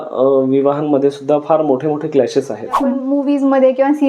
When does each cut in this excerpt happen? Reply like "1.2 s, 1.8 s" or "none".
3.0 s